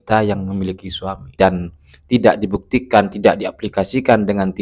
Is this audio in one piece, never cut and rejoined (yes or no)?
no